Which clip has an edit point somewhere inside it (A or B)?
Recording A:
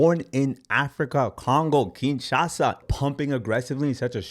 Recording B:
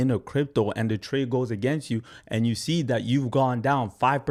A